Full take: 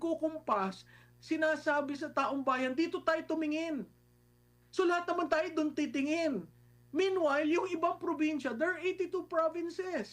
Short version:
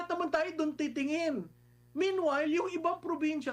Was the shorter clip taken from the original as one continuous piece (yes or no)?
yes